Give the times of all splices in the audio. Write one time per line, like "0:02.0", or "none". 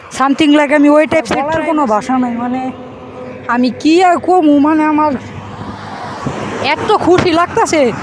0:01.5